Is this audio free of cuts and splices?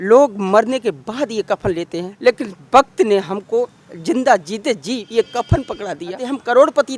no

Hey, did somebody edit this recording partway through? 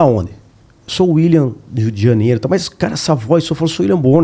no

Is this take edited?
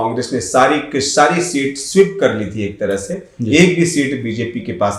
no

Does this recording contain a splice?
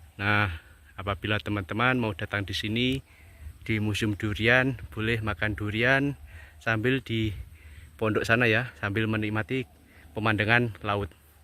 no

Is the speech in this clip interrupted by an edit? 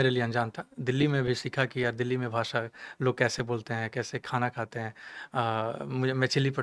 no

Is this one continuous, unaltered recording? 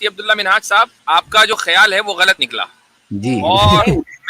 no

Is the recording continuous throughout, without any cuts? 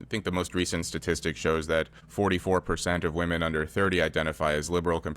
no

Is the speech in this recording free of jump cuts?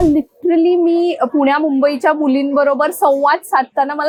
yes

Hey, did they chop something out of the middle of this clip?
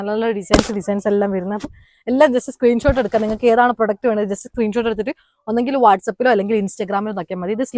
no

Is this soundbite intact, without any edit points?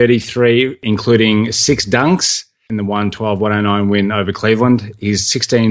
no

